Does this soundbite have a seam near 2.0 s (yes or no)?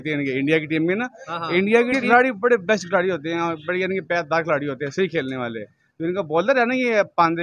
yes